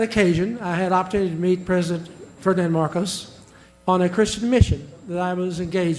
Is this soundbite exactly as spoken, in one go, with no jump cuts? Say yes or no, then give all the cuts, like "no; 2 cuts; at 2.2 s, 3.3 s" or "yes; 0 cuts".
yes; 0 cuts